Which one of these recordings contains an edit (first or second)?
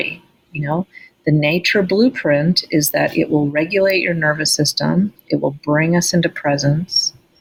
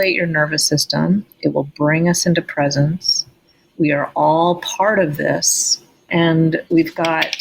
second